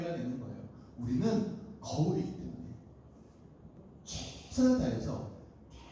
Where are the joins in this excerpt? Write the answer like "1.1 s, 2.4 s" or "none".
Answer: 3.7 s